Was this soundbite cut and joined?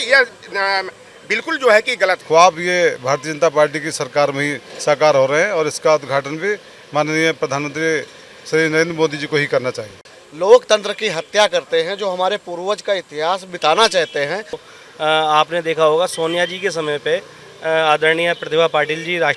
yes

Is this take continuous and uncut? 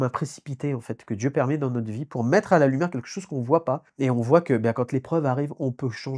no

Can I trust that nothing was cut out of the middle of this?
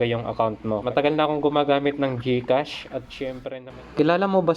no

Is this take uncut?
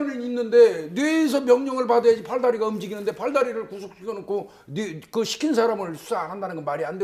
yes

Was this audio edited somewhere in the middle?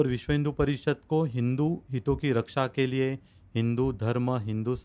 no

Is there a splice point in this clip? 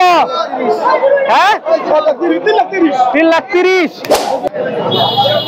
yes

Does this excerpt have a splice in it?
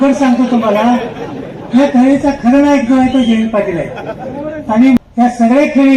yes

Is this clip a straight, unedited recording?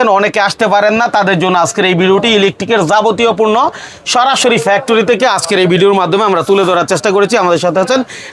yes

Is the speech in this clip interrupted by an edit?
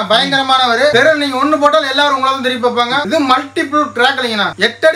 yes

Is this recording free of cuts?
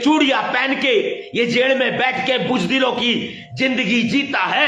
yes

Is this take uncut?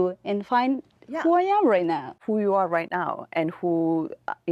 no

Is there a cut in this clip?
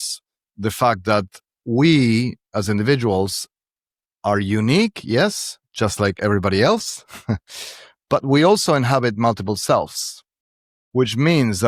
no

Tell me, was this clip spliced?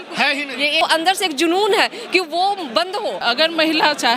yes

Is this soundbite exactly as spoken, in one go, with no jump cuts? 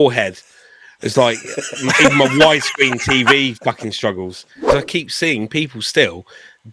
no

